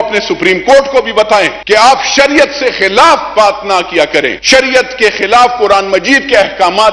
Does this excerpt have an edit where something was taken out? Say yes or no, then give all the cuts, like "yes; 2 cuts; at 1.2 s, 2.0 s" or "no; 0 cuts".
yes; 2 cuts; at 1.6 s, 4.4 s